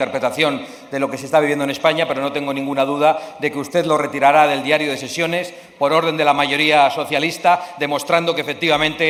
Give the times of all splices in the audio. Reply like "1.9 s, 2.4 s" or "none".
none